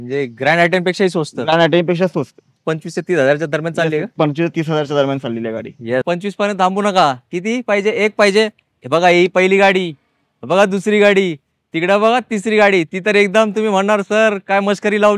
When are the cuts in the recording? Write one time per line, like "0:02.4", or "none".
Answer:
0:02.6
0:06.0